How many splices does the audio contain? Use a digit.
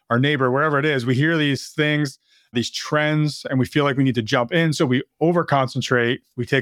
0